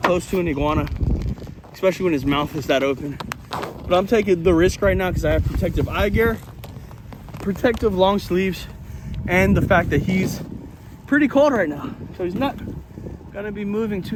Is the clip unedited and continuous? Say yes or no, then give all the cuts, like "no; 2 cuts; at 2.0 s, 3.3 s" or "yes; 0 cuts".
yes; 0 cuts